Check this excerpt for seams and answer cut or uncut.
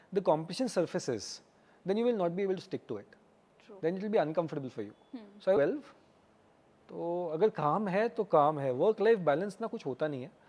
cut